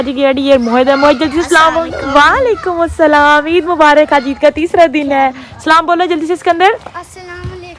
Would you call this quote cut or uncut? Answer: uncut